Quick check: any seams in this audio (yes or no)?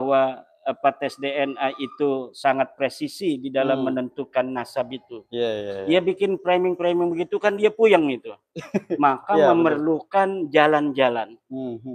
no